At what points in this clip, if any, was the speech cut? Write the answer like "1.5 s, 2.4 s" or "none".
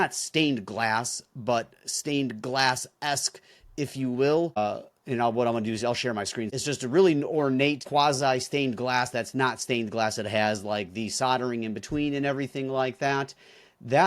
4.6 s, 6.5 s, 7.8 s